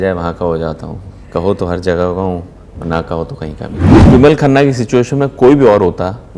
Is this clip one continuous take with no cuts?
no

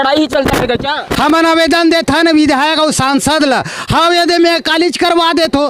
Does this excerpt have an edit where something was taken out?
no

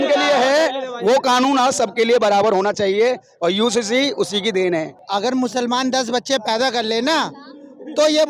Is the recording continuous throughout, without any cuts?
no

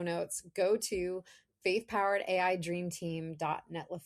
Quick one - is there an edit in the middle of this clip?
no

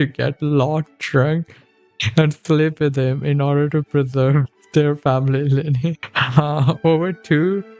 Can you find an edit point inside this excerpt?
yes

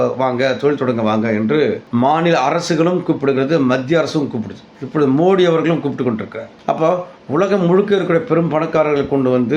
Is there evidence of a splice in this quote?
no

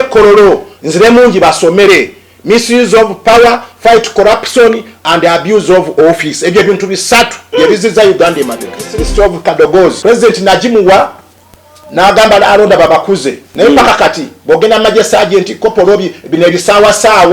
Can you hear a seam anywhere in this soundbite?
yes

